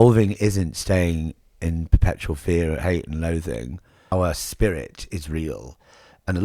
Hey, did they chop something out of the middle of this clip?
yes; 1 cut; at 4.1 s

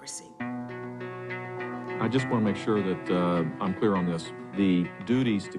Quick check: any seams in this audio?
no; 0 cuts

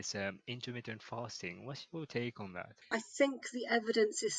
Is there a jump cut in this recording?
yes; 1 cut; at 2.8 s

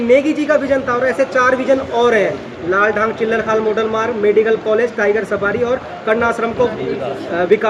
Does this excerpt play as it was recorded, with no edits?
yes; 0 cuts

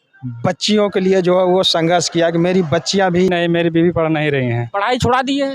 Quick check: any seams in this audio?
yes; 1 cut; at 3.3 s

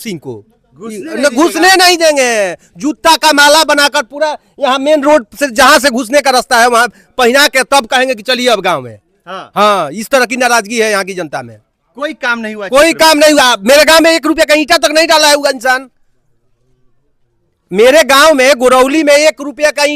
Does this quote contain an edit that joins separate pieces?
no; 0 cuts

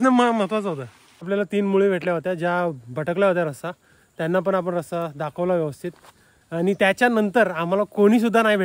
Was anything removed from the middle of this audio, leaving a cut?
yes; 1 cut; at 1.3 s

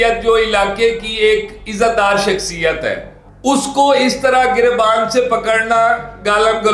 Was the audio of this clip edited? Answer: no; 0 cuts

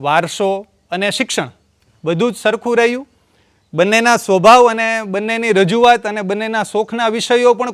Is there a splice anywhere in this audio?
no; 0 cuts

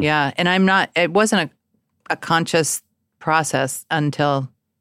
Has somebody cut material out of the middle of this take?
no; 0 cuts

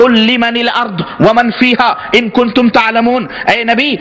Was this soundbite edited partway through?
no; 0 cuts

